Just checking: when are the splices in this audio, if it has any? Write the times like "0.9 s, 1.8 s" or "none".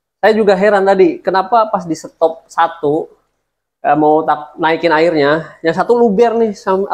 none